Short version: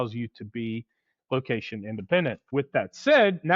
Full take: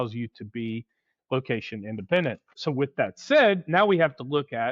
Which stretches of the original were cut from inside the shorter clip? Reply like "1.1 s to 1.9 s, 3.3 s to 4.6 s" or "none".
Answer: 2.5 s to 2.7 s